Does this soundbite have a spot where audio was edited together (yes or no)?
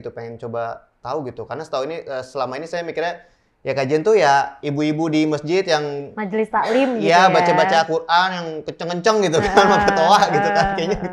no